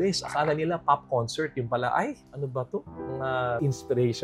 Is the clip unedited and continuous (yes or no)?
yes